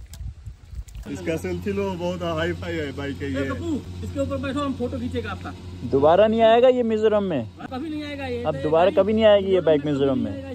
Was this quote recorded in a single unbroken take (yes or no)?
no